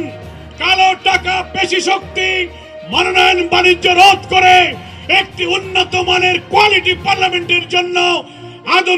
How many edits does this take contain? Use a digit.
0